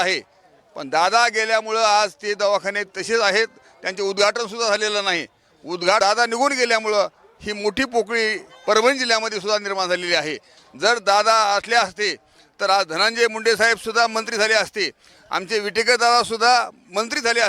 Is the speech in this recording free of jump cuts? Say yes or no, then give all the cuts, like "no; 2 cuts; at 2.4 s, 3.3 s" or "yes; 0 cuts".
no; 1 cut; at 6.0 s